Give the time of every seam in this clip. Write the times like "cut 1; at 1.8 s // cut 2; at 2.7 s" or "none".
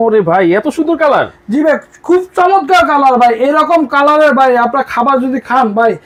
none